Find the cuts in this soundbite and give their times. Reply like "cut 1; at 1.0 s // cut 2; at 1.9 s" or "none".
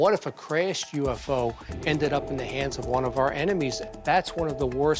cut 1; at 3.8 s